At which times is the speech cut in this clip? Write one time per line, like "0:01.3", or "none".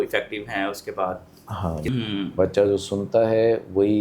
0:01.9

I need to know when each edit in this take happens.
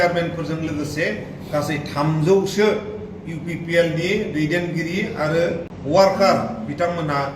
0:05.7

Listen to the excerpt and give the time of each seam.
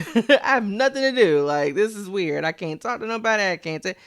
none

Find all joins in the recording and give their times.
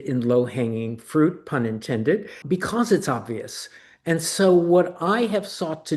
0:02.3

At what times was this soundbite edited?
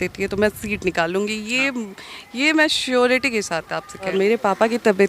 0:04.1

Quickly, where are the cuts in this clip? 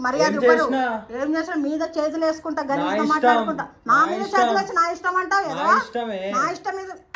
none

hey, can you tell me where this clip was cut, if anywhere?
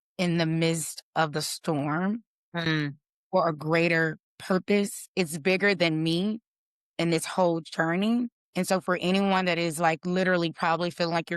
0:04.3
0:08.4

